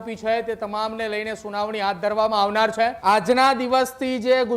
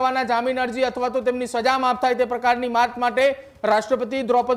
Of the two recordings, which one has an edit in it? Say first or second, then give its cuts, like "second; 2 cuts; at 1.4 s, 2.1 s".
first; 1 cut; at 3.0 s